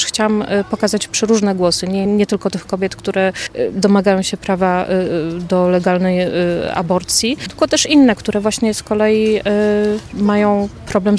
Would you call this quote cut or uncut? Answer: cut